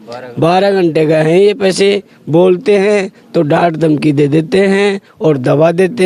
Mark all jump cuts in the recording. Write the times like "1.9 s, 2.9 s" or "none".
none